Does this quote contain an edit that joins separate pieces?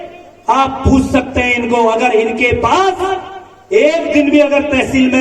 no; 0 cuts

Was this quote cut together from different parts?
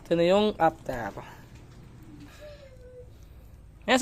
yes; 1 cut; at 2.2 s

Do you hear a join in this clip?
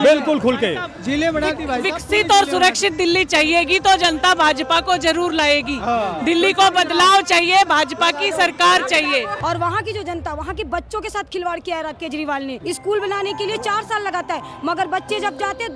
yes; 2 cuts; at 9.3 s, 12.6 s

